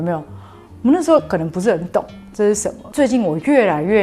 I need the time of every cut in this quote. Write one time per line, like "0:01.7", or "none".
0:02.8

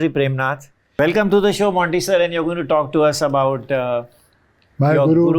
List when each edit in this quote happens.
0:01.0

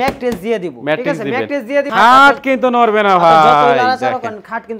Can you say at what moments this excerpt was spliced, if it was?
0:01.9

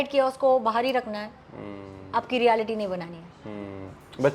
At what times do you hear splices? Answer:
none

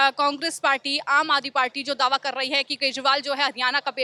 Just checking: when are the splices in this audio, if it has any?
none

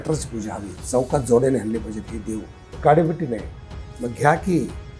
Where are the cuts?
0:02.8

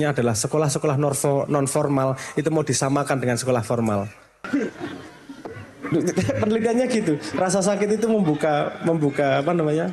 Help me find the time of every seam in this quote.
0:04.4

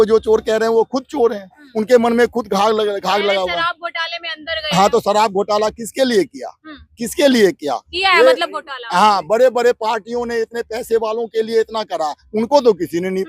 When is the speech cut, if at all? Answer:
none

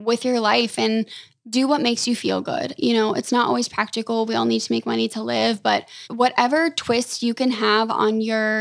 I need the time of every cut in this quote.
0:06.0

